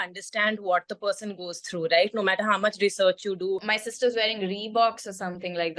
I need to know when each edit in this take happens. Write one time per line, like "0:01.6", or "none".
0:03.7